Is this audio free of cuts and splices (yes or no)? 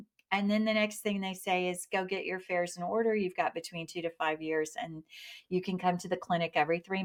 yes